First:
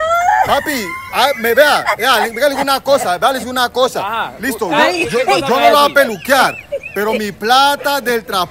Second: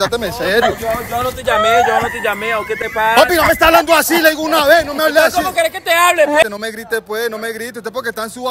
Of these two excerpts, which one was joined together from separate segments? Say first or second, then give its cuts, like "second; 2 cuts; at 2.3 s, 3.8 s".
second; 1 cut; at 6.4 s